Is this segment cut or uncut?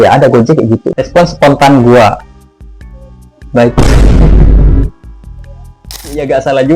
cut